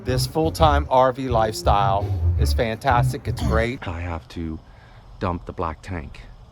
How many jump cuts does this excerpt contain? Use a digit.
1